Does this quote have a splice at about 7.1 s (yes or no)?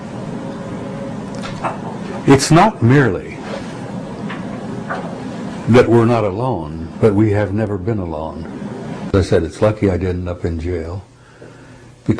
no